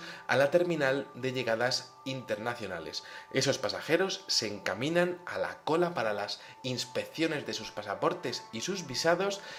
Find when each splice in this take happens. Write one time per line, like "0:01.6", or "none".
none